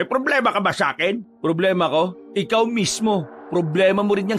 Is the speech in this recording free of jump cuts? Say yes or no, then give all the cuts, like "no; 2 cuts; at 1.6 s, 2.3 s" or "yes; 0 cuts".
no; 3 cuts; at 1.3 s, 2.2 s, 3.4 s